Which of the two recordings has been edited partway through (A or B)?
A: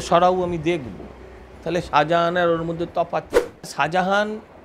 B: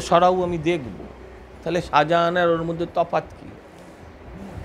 A